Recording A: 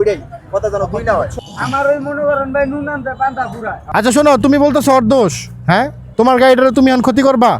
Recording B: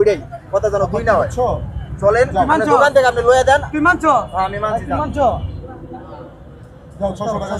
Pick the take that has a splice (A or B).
A